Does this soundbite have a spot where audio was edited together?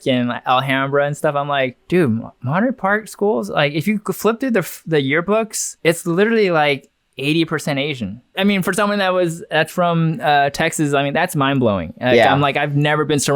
yes; 2 cuts; at 5.6 s, 8.4 s

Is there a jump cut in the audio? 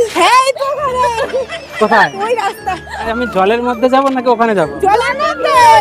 yes; 1 cut; at 3.1 s

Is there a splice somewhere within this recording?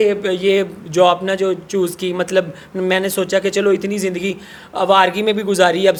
no; 0 cuts

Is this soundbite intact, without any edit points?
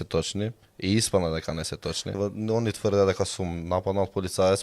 no; 1 cut; at 2.2 s

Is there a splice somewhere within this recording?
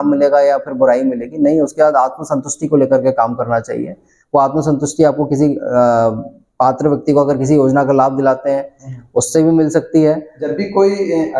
yes; 1 cut; at 10.4 s

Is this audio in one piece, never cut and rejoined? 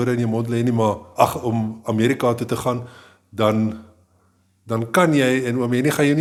yes; 0 cuts

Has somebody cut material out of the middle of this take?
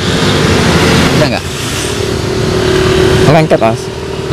yes; 1 cut; at 1.2 s

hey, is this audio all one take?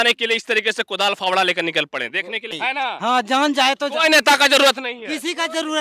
no; 1 cut; at 2.6 s

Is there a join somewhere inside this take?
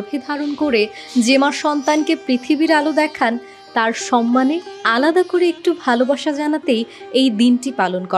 yes; 1 cut; at 3.5 s

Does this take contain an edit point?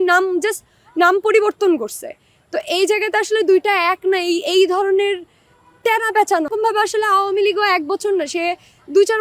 yes; 1 cut; at 6.5 s

